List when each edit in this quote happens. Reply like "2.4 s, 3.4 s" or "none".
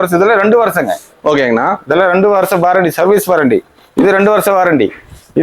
none